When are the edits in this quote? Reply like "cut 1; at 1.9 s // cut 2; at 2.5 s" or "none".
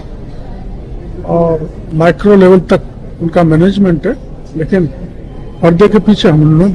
cut 1; at 4.4 s